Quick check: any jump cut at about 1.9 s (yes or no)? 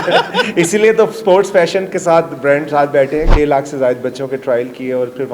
no